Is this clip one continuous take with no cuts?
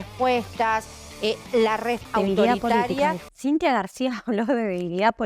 no; 2 cuts; at 2.1 s, 3.3 s

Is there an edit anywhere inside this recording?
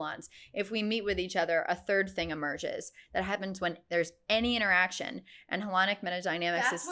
no; 0 cuts

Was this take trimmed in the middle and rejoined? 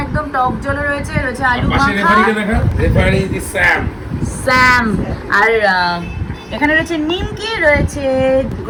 no; 0 cuts

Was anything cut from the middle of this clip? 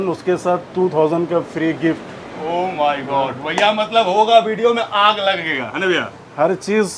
no; 0 cuts

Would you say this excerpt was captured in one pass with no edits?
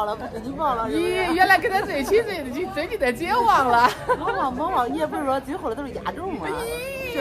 yes; 0 cuts

